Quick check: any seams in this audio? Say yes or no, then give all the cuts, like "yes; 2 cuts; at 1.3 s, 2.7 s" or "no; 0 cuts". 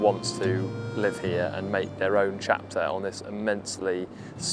no; 0 cuts